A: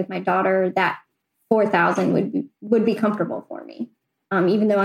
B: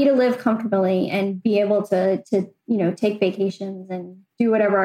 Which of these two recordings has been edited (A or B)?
A